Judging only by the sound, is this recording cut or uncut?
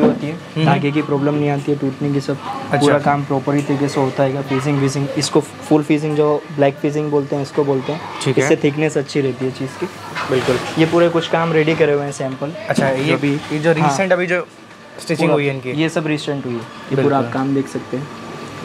uncut